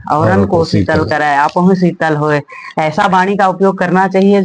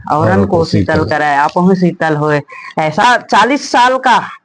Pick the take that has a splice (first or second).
second